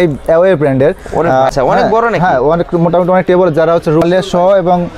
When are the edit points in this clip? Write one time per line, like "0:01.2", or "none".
0:01.5
0:04.0